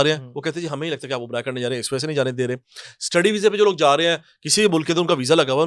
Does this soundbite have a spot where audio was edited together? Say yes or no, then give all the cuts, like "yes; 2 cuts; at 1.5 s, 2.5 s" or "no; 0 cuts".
no; 0 cuts